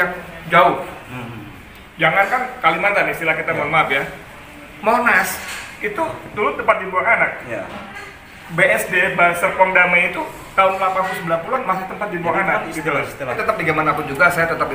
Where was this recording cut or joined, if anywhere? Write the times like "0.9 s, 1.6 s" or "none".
13.4 s